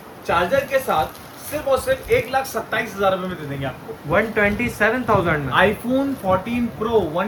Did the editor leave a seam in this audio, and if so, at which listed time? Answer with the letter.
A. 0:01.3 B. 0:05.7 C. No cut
C